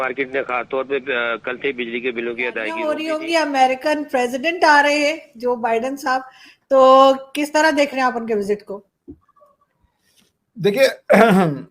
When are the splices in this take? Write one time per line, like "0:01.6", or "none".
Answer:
0:02.9

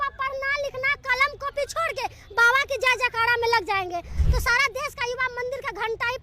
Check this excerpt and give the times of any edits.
0:04.1

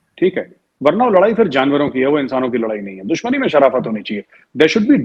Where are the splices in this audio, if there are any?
none

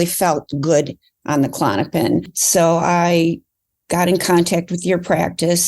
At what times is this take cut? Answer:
0:02.4

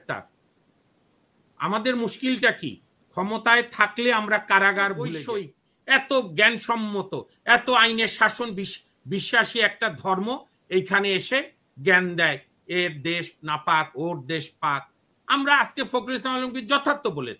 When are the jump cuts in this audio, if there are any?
0:05.2

